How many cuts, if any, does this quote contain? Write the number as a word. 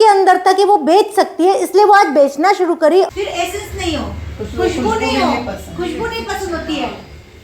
one